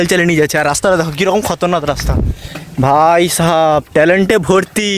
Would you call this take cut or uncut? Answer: uncut